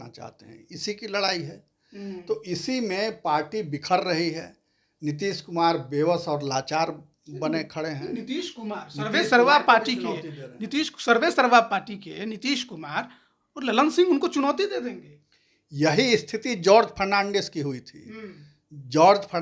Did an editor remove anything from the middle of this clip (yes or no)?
no